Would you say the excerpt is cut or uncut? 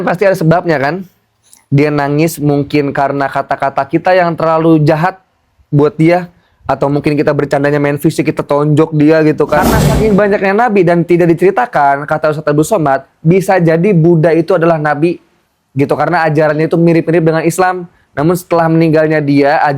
cut